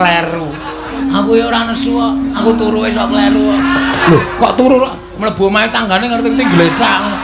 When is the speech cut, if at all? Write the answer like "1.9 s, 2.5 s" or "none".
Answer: 1.0 s, 2.4 s, 4.0 s